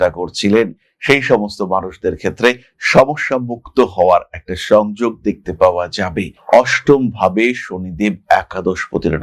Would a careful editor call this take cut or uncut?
cut